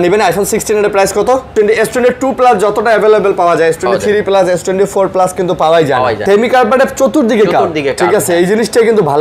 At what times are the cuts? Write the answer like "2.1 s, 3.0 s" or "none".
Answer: 1.5 s, 6.2 s

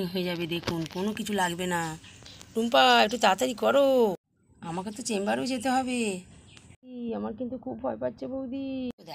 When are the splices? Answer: none

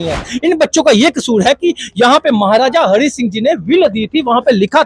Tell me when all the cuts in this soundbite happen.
none

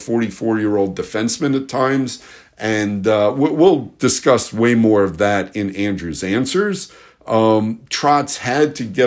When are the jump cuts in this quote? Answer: none

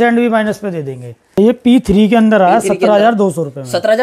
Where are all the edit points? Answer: 1.4 s

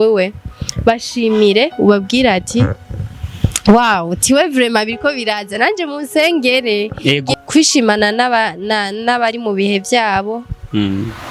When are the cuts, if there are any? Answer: 7.3 s

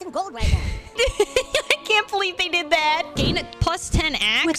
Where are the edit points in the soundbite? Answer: 0.9 s, 3.2 s

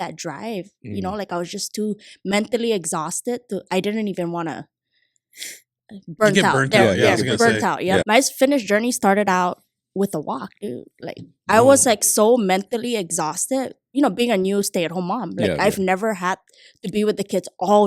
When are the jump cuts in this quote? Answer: 8.0 s

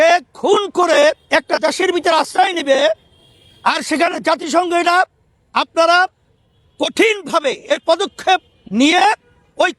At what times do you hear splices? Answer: none

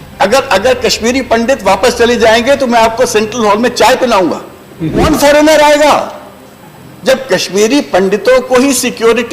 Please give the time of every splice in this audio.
5.0 s

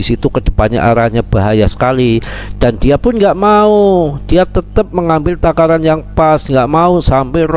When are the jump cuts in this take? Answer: none

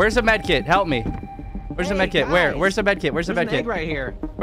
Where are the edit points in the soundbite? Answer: none

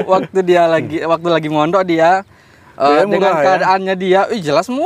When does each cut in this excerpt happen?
none

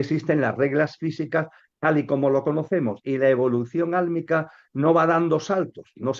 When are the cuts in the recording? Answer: none

